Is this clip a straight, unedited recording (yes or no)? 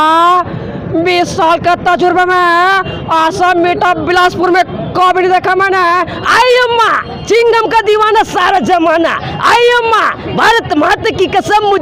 yes